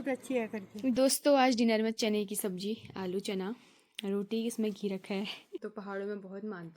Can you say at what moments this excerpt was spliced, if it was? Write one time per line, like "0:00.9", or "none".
0:01.0
0:05.5